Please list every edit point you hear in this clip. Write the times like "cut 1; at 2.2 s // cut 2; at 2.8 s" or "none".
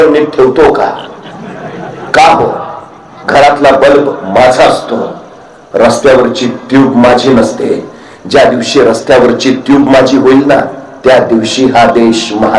none